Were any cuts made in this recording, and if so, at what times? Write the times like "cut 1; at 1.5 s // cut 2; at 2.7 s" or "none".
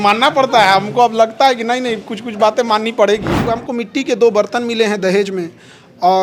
cut 1; at 3.5 s